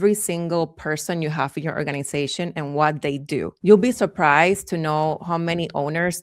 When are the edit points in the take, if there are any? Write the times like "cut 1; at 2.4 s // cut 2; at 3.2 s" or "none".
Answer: cut 1; at 3.5 s